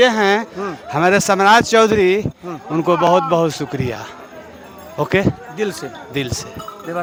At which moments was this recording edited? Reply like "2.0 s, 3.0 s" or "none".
none

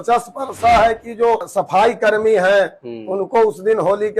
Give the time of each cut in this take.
1.5 s

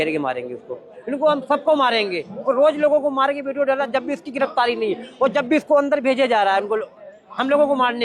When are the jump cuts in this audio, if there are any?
1.0 s

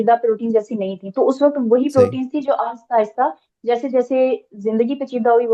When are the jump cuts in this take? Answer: none

